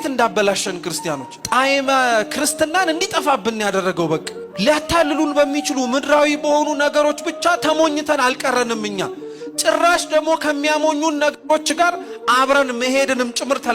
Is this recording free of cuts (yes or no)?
no